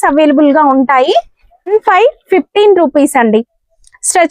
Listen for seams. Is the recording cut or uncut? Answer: cut